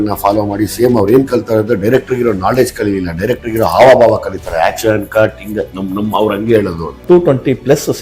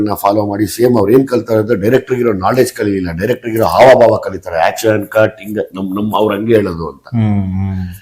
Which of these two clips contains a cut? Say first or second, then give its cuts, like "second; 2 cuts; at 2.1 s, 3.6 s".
first; 1 cut; at 7.0 s